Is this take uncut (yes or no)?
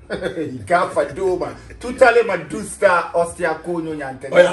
yes